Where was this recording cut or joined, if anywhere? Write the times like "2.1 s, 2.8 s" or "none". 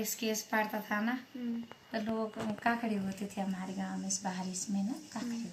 none